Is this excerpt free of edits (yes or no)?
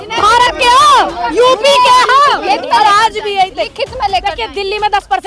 no